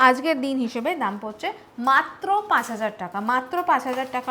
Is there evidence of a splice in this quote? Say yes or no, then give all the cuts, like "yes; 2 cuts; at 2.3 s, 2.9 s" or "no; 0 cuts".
no; 0 cuts